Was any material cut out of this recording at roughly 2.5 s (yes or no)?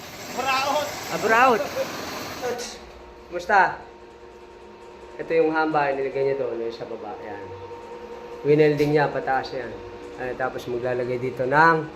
yes